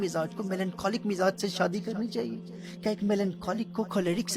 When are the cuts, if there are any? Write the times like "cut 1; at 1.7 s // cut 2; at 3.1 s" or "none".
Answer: none